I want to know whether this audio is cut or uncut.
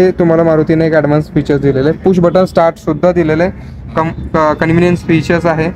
uncut